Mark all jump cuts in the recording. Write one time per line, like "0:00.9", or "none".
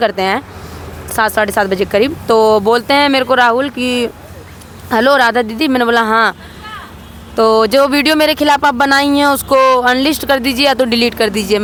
none

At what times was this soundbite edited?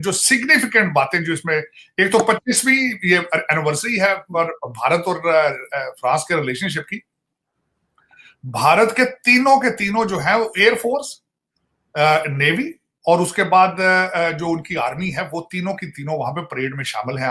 none

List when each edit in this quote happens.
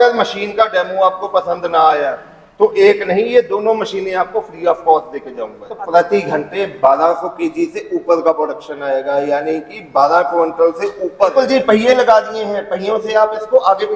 0:05.8
0:11.3

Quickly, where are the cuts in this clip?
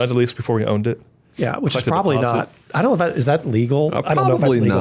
none

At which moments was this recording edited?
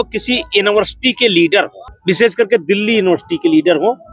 0:01.8

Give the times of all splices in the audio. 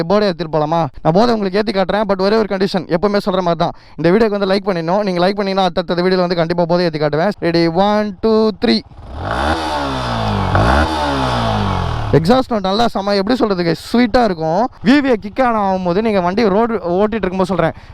0:00.9
0:07.3
0:14.8

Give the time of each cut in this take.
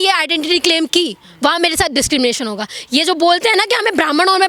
none

